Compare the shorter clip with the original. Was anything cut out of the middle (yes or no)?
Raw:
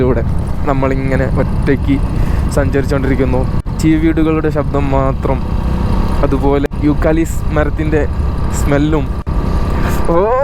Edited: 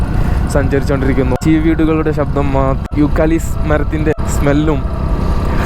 yes